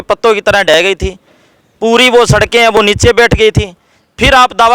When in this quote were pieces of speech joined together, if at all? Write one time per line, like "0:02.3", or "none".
none